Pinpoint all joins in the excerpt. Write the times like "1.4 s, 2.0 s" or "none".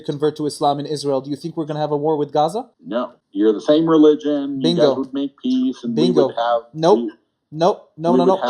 2.8 s